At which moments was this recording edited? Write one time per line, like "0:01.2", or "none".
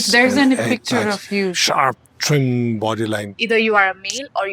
0:02.1
0:03.3